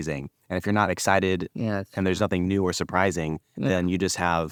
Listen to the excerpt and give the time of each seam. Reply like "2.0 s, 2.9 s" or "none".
none